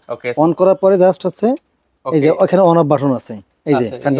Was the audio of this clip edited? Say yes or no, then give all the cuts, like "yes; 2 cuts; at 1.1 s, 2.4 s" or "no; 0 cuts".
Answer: no; 0 cuts